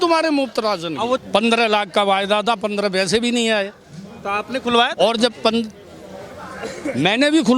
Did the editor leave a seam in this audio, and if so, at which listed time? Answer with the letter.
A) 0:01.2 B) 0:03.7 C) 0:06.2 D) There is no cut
A